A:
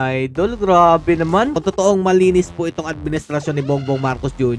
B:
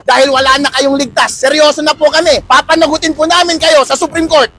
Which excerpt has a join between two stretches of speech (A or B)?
A